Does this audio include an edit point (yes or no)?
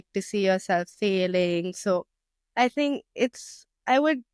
no